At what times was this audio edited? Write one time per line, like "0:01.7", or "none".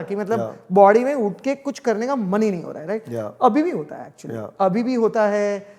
none